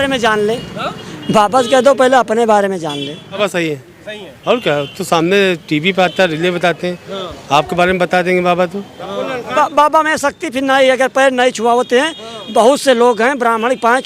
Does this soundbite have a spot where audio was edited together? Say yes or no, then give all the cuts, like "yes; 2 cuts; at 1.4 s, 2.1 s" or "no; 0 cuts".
yes; 2 cuts; at 3.4 s, 9.6 s